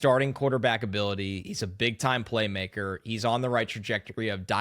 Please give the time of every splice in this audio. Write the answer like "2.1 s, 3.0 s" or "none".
none